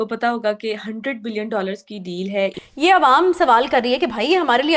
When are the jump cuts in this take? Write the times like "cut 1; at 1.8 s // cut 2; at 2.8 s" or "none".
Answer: cut 1; at 2.6 s